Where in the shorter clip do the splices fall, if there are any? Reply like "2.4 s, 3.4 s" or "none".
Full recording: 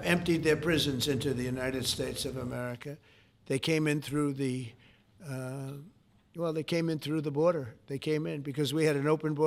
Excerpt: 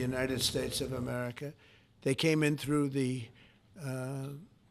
none